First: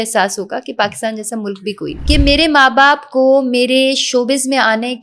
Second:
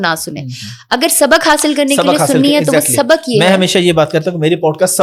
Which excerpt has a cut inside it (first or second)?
first